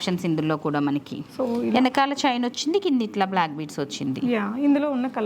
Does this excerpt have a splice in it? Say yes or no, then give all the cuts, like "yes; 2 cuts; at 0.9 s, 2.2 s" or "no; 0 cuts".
no; 0 cuts